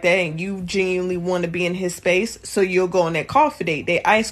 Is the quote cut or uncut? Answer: uncut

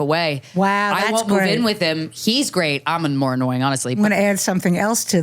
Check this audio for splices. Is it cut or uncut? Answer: cut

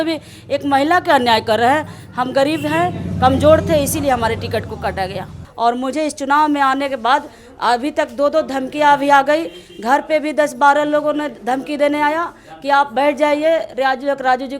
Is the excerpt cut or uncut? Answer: cut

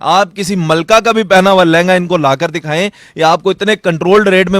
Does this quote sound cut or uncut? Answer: uncut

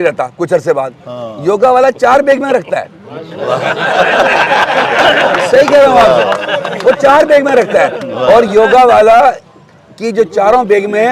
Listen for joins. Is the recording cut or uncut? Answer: uncut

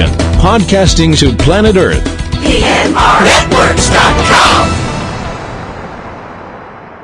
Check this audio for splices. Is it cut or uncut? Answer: uncut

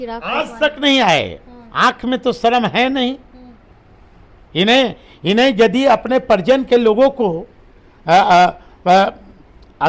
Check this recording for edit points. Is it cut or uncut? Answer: uncut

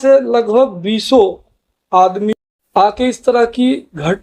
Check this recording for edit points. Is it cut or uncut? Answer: cut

